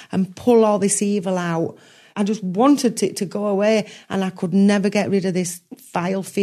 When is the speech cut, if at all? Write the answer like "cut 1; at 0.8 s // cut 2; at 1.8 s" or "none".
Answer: cut 1; at 2.1 s